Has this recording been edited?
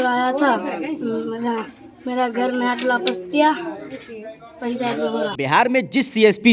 no; 0 cuts

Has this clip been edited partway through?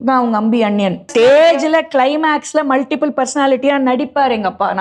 yes; 1 cut; at 1.0 s

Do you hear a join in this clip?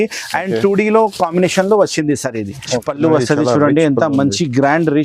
yes; 1 cut; at 2.8 s

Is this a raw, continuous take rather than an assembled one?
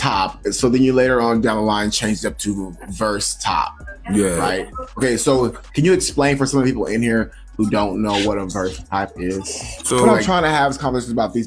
no; 1 cut; at 10.2 s

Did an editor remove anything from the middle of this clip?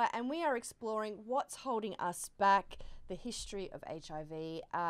no; 0 cuts

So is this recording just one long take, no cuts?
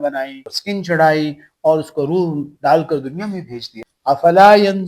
no; 1 cut; at 3.7 s

